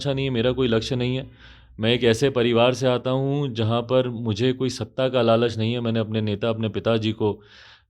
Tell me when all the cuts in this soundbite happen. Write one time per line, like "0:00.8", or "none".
none